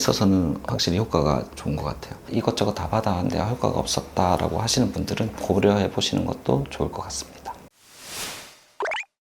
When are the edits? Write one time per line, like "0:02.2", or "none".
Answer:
0:02.2